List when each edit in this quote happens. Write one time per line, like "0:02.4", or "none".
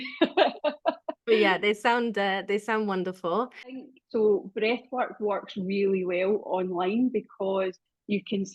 0:03.8